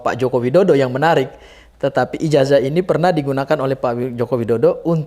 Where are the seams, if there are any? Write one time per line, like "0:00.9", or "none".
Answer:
none